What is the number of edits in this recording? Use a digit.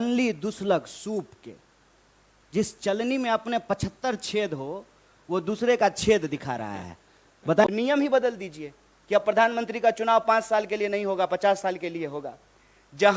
1